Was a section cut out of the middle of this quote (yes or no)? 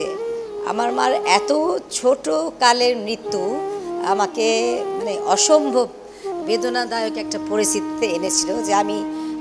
no